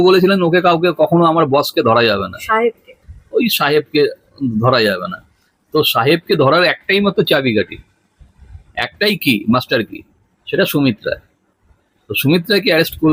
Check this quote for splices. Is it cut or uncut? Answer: uncut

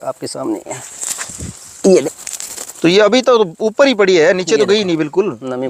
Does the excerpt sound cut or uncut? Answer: cut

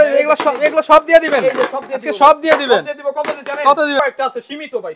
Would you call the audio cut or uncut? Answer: cut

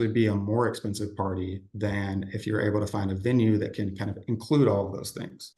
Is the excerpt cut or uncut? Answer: uncut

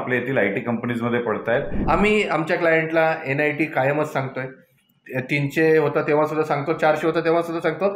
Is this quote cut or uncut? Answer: cut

